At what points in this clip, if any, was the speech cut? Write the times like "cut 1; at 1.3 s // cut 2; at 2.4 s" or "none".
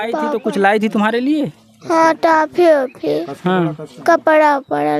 none